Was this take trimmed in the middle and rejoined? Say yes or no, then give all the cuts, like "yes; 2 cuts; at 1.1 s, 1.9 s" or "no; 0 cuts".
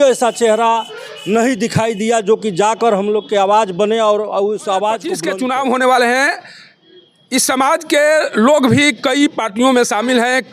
yes; 1 cut; at 5.2 s